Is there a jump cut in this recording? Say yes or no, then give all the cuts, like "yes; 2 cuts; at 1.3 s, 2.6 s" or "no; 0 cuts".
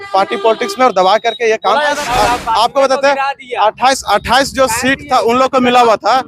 yes; 1 cut; at 1.9 s